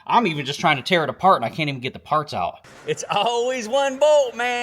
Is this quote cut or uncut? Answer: cut